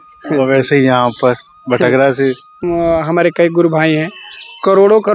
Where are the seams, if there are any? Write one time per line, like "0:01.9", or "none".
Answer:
0:02.6